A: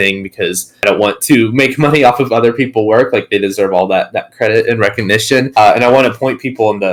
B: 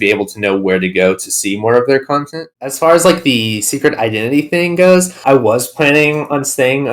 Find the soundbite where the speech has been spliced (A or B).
B